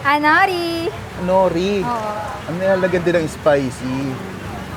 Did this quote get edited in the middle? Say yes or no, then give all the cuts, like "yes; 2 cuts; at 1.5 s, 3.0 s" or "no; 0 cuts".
no; 0 cuts